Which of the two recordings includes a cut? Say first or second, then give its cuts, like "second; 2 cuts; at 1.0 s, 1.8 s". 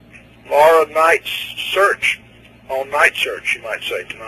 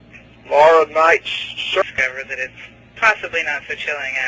first; 1 cut; at 1.8 s